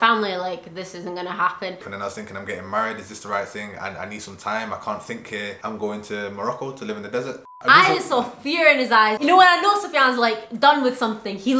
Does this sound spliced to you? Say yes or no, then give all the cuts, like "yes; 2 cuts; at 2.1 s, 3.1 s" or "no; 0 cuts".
yes; 2 cuts; at 1.8 s, 7.6 s